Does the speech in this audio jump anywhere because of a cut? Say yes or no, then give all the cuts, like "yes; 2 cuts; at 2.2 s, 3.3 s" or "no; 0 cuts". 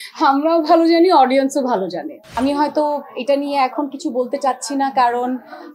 yes; 1 cut; at 2.2 s